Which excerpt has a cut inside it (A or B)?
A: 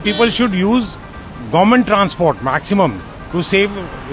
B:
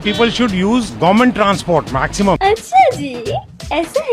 B